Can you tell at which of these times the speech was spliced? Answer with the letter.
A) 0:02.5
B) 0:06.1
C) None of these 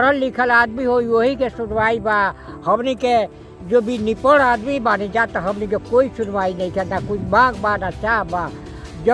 C